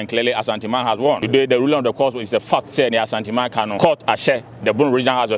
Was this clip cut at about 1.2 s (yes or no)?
yes